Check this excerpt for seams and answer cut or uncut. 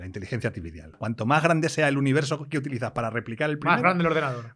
cut